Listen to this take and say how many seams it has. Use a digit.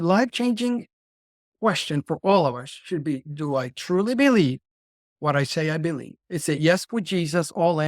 1